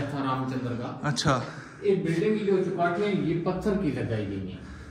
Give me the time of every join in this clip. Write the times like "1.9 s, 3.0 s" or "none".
none

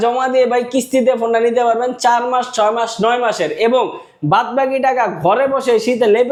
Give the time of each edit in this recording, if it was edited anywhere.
none

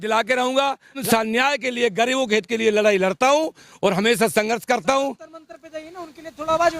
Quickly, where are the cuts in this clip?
1.0 s

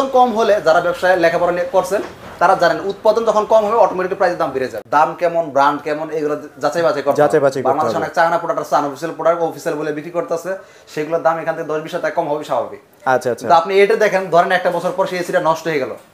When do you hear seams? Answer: 4.8 s

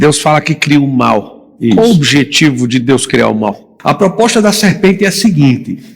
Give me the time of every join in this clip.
3.7 s

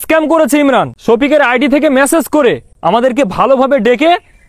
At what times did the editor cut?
0.9 s, 2.7 s

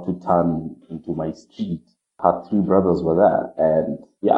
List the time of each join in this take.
2.1 s

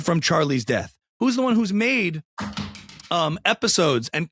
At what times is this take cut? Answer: none

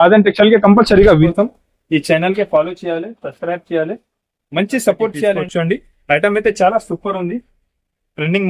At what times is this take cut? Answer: 1.3 s, 5.4 s

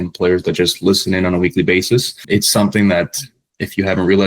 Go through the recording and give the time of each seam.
2.2 s

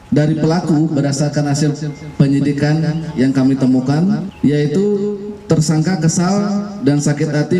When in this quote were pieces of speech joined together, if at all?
4.3 s

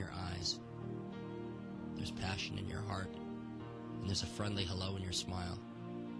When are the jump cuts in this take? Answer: 1.0 s

